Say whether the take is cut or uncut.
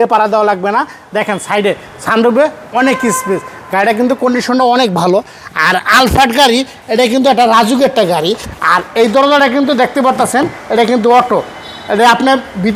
uncut